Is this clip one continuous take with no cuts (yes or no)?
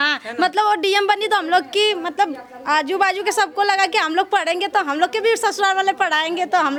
yes